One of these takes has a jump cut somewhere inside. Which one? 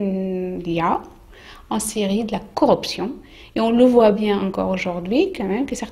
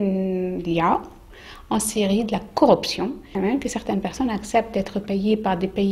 second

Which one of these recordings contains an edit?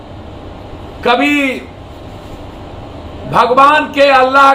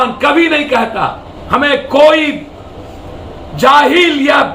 second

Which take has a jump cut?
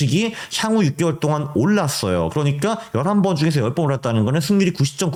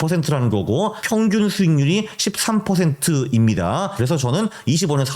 second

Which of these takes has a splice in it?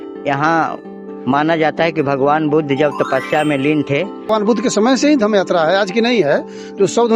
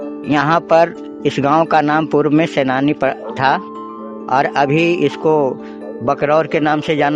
first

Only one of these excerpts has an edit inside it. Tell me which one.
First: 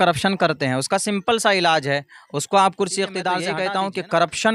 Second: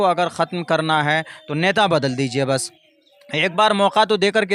first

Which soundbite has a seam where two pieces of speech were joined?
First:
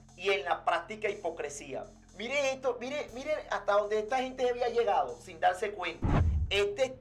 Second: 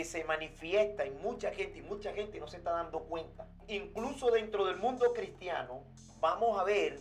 second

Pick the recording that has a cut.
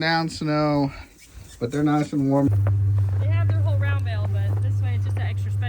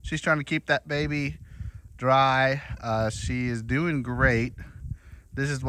first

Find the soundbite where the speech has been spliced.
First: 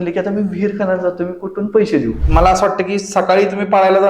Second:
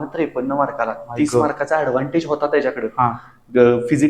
first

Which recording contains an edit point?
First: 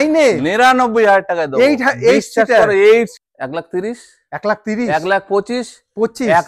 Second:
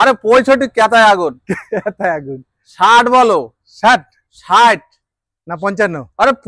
first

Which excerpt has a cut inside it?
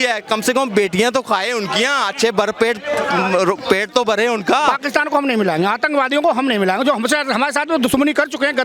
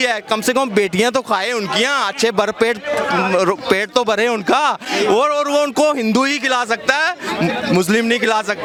first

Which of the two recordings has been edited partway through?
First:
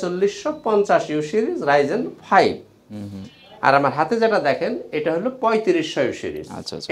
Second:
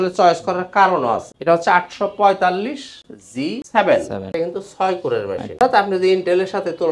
second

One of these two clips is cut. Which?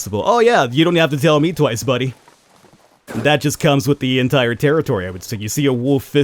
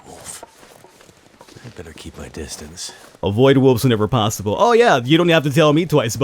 second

